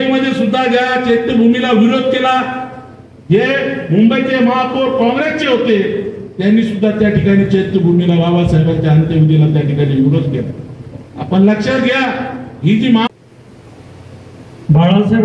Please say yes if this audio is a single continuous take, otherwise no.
no